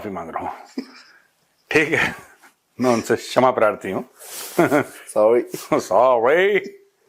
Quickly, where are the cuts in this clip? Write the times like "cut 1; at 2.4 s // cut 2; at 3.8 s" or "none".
none